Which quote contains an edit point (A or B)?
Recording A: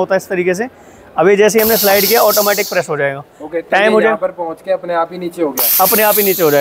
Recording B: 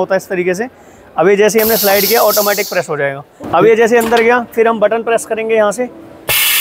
B